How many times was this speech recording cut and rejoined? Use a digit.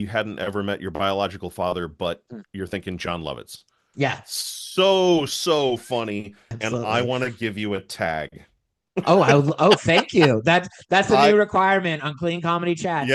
1